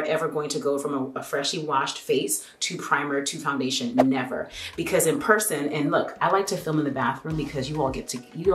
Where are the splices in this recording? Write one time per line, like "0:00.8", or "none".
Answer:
none